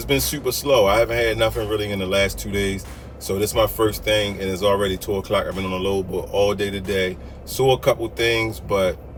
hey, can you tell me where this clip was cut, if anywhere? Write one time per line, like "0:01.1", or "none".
none

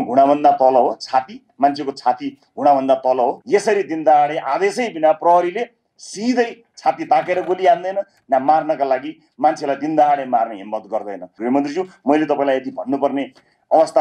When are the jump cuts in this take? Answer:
0:03.4
0:11.3

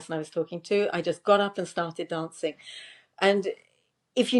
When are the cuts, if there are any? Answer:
none

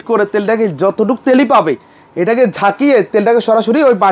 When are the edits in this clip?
none

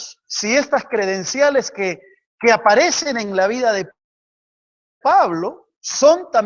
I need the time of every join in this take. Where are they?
none

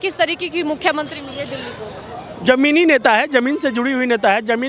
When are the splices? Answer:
none

